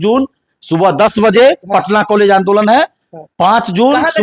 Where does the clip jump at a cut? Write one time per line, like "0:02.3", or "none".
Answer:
none